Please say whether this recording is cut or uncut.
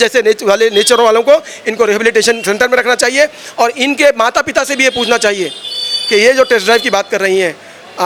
uncut